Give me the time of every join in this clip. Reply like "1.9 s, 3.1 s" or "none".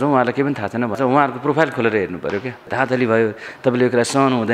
1.0 s, 2.7 s